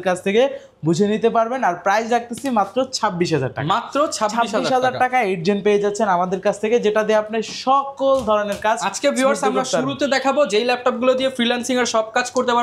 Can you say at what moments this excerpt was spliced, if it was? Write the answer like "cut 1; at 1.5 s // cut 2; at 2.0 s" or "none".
none